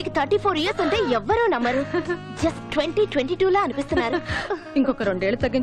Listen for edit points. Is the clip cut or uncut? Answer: uncut